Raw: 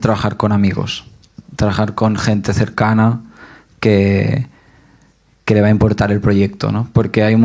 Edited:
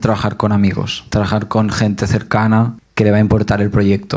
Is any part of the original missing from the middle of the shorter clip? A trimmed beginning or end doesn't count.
yes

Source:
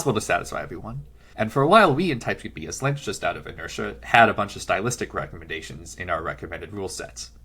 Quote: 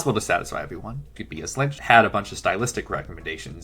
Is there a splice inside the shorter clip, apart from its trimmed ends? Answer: yes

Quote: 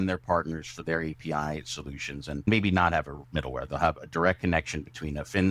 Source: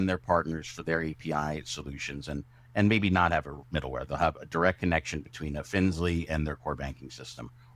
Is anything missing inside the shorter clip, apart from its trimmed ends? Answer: yes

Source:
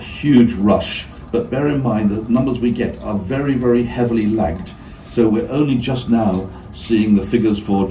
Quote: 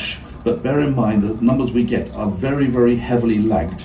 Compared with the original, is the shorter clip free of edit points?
yes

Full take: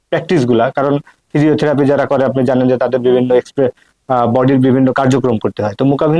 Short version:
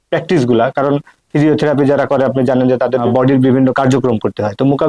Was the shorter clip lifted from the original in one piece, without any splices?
no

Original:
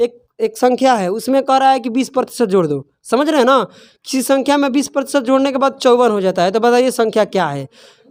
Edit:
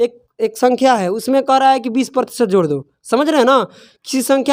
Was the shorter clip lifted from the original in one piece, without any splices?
yes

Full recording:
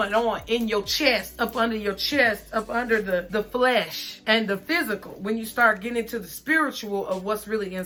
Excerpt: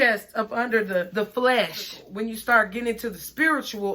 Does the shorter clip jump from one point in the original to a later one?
yes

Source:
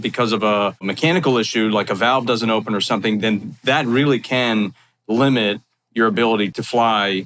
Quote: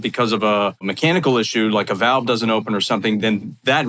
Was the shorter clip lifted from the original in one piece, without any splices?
yes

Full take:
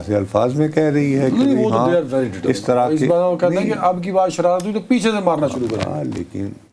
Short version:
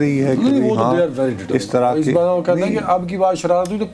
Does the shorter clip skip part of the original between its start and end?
no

